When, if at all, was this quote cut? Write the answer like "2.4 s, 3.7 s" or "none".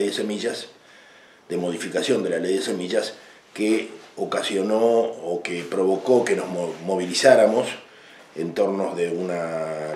3.9 s